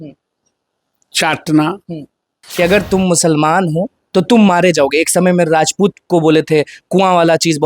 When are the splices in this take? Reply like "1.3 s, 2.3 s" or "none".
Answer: 2.4 s